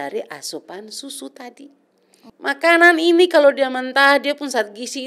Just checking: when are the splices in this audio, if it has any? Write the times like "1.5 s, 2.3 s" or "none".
2.2 s

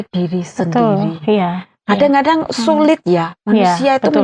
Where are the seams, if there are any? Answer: none

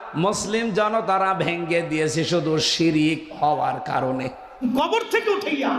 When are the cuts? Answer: 4.5 s

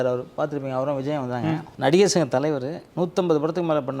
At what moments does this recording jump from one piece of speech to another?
1.7 s, 2.8 s

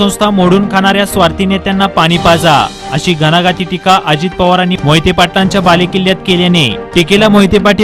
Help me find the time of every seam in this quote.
none

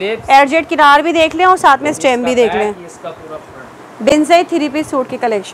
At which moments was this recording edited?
none

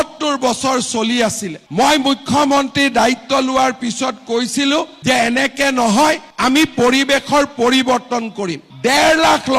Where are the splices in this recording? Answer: 1.6 s, 8.7 s

